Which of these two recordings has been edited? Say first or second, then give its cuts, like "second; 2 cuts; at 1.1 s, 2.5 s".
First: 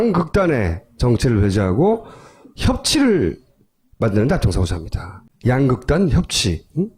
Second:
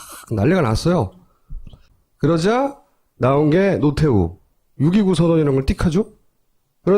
second; 1 cut; at 3.6 s